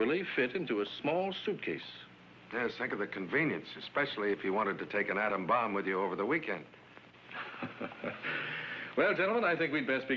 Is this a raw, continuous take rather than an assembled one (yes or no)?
no